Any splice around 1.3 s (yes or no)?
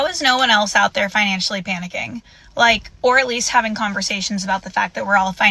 no